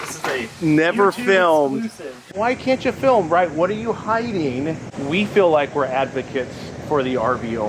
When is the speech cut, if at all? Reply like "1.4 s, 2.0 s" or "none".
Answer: 2.3 s, 4.9 s